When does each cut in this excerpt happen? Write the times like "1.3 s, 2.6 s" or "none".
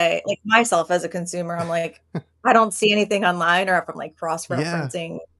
none

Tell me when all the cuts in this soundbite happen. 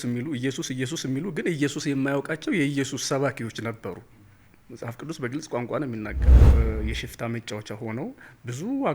6.4 s

